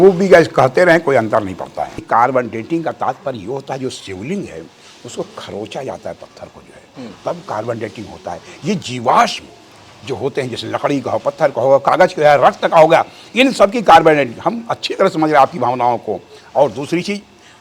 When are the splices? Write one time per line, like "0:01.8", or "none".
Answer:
0:02.0